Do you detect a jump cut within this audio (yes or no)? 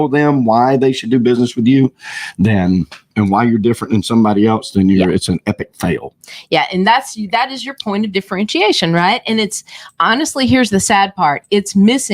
no